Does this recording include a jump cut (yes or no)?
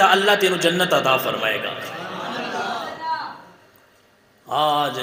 no